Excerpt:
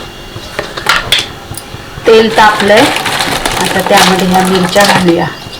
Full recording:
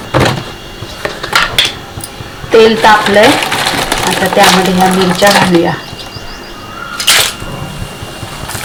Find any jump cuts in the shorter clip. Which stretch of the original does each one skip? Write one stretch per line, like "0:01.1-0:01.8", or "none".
none